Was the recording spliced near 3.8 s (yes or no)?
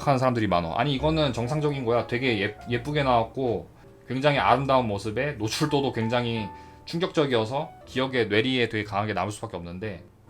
yes